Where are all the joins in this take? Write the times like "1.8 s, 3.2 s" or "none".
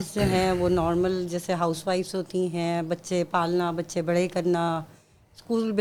none